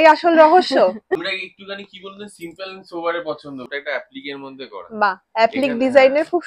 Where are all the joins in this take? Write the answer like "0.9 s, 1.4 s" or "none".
1.2 s, 3.7 s